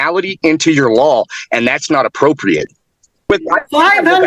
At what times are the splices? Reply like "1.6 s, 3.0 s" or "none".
3.3 s